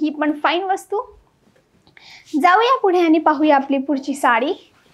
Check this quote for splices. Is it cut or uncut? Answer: uncut